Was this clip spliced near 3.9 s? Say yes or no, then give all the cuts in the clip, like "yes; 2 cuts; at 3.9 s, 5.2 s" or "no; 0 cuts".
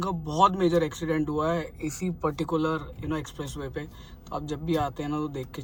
no; 0 cuts